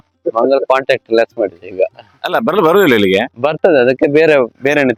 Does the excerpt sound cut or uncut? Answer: uncut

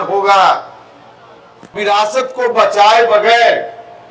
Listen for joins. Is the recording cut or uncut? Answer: cut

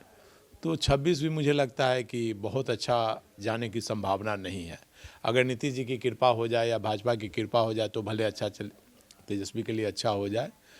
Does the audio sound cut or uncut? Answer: uncut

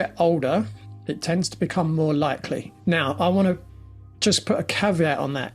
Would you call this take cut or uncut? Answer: cut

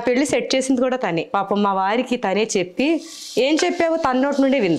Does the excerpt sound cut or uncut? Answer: cut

